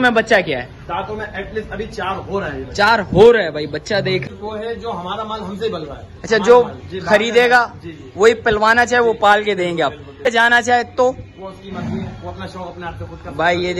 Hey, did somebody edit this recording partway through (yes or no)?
yes